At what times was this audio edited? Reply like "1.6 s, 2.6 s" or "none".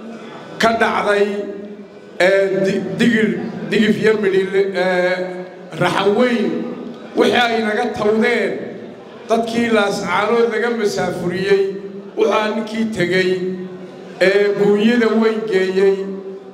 none